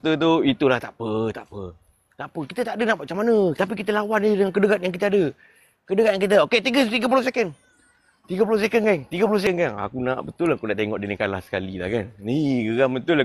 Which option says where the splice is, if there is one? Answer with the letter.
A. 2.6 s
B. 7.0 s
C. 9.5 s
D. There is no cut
C